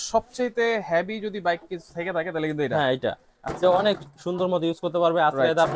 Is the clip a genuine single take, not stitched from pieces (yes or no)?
yes